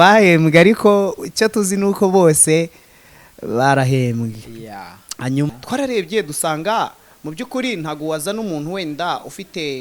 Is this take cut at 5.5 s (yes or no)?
yes